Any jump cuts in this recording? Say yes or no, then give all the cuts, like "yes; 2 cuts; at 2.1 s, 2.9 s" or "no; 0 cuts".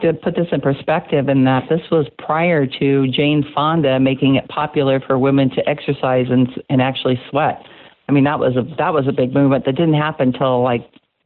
no; 0 cuts